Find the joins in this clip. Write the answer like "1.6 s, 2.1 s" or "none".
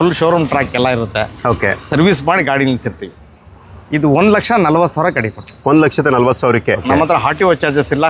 3.2 s, 6.8 s